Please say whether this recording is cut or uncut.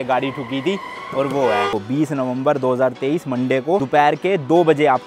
cut